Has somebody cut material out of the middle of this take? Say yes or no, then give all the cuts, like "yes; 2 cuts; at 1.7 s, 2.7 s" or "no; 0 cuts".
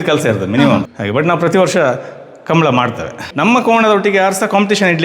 yes; 2 cuts; at 0.9 s, 3.3 s